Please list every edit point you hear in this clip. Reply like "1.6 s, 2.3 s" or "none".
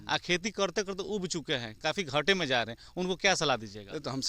none